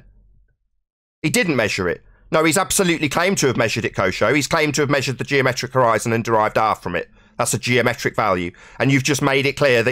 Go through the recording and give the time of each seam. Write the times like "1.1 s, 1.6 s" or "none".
none